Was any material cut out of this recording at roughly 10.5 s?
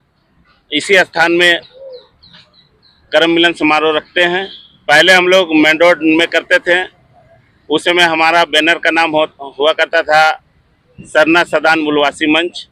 no; 0 cuts

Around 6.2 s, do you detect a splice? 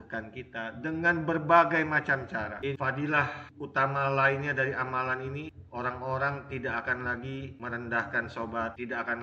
no; 1 cut; at 2.8 s

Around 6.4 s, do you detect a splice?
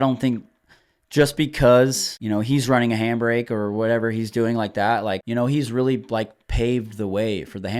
no; 2 cuts; at 2.1 s, 5.2 s

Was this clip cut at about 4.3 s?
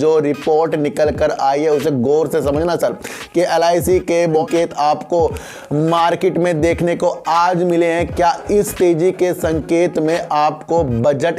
yes; 1 cut; at 4.3 s

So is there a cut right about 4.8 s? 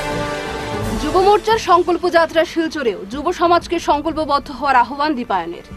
no; 1 cut; at 0.9 s

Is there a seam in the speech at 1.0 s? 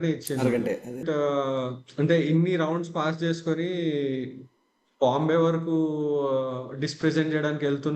yes; 1 cut; at 1.0 s

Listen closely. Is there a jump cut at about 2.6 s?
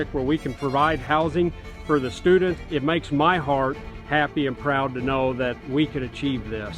yes; 1 cut; at 2.6 s

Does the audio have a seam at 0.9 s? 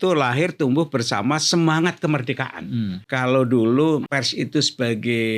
no; 2 cuts; at 3.0 s, 4.1 s

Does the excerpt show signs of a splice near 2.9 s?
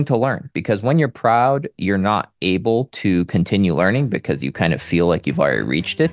no; 0 cuts

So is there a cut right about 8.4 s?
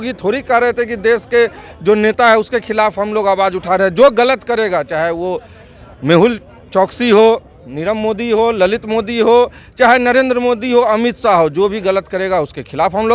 no; 0 cuts

